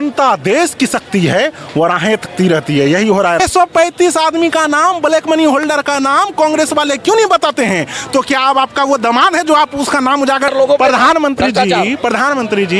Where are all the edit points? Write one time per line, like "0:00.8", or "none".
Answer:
0:03.4
0:10.5